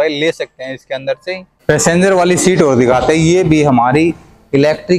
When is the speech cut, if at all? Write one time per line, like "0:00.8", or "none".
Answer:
0:01.5